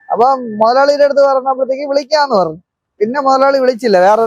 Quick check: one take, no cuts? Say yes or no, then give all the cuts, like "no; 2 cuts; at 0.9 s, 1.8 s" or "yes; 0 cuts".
yes; 0 cuts